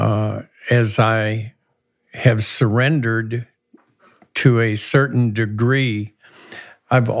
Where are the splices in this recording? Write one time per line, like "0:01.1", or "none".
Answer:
none